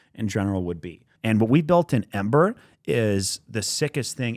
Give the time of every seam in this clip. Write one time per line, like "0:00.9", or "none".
0:01.0

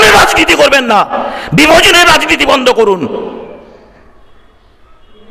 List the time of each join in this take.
none

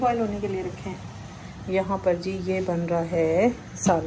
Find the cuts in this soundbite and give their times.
none

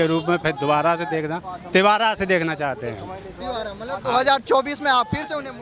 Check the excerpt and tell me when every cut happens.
none

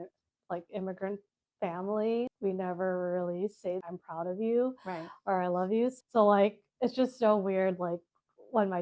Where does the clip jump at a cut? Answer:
0:02.3
0:03.8
0:06.0

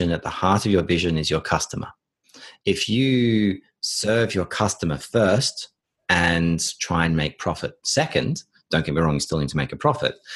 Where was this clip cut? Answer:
0:02.5

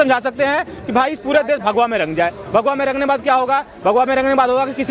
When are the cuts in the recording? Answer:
none

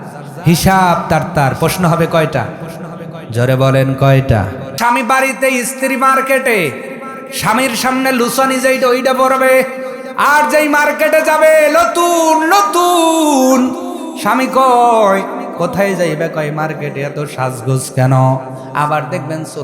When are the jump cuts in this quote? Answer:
0:04.7

